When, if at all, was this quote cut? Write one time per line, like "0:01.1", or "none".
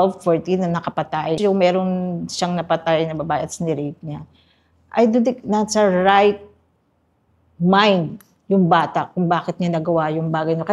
0:01.4